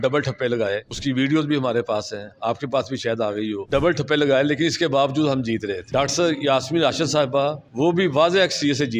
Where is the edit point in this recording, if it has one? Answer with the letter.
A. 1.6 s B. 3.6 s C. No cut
B